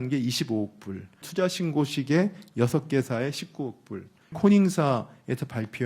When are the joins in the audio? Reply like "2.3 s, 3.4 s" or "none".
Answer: 1.2 s, 4.3 s